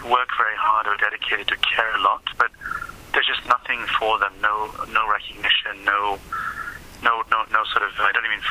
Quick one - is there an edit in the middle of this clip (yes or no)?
no